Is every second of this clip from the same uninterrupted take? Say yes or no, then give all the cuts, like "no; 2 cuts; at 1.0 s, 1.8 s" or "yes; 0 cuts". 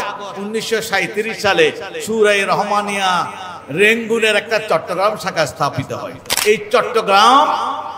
no; 1 cut; at 6.2 s